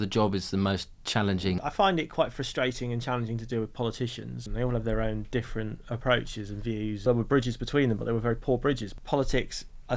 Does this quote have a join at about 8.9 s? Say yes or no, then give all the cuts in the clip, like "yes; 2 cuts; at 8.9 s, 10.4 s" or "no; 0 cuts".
yes; 4 cuts; at 1.6 s, 4.4 s, 7.0 s, 8.9 s